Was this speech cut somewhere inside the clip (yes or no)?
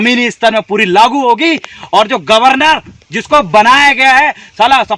no